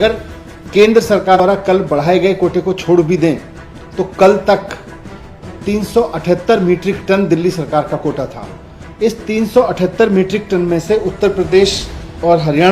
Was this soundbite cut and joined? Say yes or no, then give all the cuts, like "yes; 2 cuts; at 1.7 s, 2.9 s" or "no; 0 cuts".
yes; 1 cut; at 1.4 s